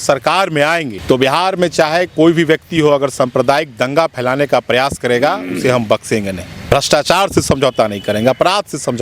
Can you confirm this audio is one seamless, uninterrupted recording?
no; 2 cuts; at 0.9 s, 6.5 s

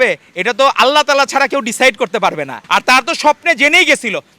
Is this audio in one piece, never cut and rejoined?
no; 1 cut; at 2.6 s

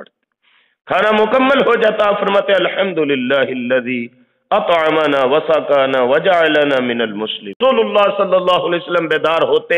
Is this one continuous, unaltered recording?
no; 1 cut; at 7.5 s

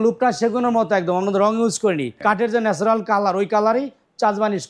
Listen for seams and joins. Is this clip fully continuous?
no; 1 cut; at 2.1 s

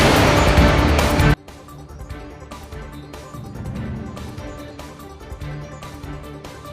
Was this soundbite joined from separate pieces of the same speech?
no; 0 cuts

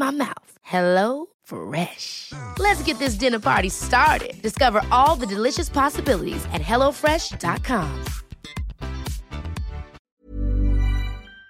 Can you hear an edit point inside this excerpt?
yes; 1 cut; at 9.9 s

